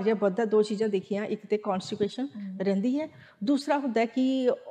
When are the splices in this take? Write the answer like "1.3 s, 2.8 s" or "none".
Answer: none